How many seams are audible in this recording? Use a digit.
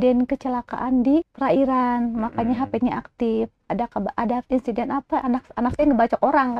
2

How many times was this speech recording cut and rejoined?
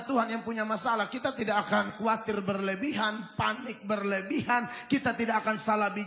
1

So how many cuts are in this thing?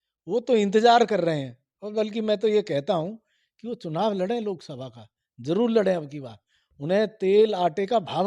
0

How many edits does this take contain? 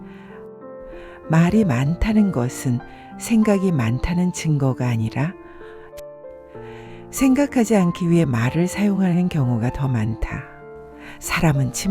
2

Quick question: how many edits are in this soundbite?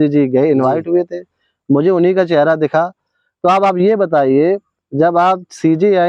0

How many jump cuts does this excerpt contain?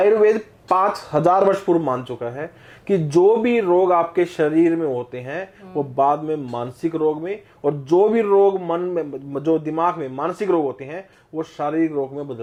0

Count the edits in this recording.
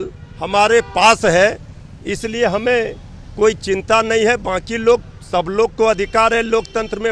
0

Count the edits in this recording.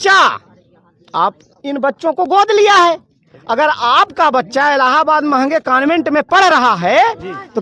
0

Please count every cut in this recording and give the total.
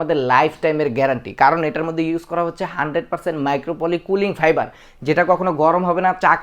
0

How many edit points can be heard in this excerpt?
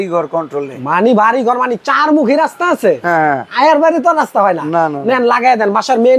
0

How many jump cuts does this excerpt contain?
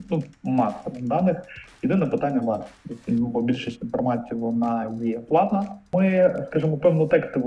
1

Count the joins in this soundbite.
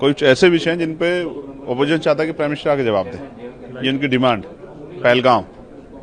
0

